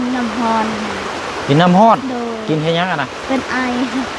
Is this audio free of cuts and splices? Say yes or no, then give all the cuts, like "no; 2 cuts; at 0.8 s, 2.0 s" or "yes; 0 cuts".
yes; 0 cuts